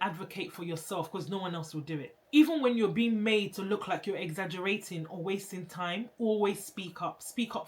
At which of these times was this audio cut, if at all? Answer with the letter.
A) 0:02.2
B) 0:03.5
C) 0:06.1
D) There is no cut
A